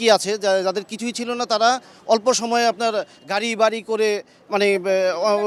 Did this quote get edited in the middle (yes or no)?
no